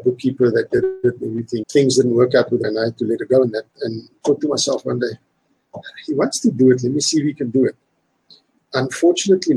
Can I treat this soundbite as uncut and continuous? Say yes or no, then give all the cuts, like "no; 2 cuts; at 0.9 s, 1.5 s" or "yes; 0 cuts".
no; 2 cuts; at 1.6 s, 2.7 s